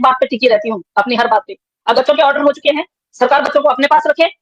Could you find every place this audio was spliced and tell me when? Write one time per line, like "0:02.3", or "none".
0:01.9